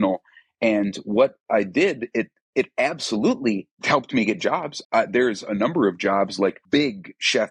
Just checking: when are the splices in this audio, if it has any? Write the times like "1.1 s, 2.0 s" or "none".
3.7 s, 4.7 s, 6.6 s